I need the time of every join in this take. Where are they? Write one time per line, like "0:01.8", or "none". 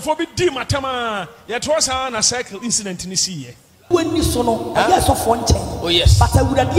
0:03.9